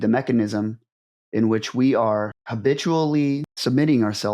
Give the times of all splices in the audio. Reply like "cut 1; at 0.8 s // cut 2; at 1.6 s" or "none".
cut 1; at 2.4 s // cut 2; at 3.5 s